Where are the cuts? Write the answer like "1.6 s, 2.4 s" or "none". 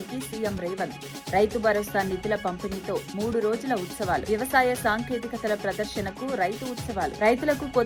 none